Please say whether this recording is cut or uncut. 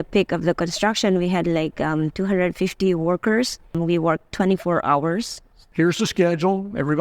cut